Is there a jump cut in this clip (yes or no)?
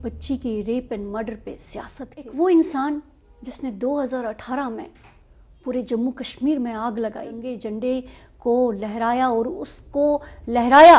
yes